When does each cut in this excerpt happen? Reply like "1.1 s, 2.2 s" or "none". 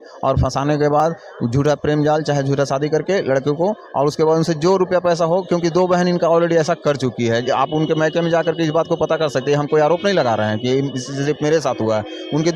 none